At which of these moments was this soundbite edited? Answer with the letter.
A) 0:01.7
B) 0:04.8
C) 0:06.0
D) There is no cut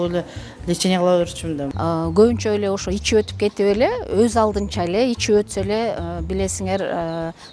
A